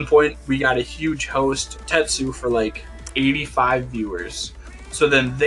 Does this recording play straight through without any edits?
no; 2 cuts; at 1.8 s, 3.0 s

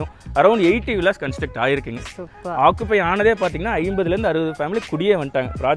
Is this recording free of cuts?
yes; 0 cuts

